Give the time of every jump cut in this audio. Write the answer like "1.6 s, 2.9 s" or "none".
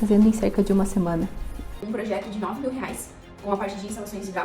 1.7 s